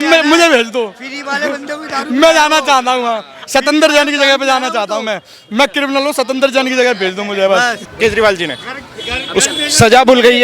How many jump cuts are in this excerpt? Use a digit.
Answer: 1